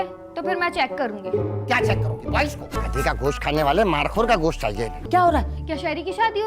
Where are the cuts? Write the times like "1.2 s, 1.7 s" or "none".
2.7 s, 5.0 s